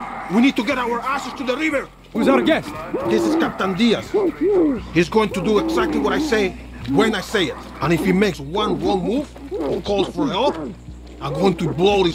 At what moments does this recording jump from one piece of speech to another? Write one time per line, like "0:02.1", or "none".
none